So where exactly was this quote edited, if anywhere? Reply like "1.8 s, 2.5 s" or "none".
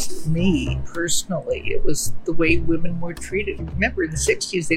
3.6 s